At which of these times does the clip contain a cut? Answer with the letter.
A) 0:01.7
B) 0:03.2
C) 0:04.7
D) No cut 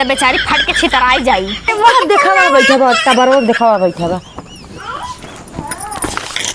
A